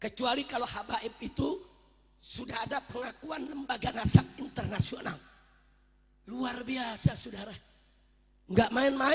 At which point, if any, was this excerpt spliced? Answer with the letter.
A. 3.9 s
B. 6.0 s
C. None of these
C